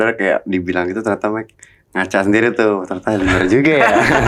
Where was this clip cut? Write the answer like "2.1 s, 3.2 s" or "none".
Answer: none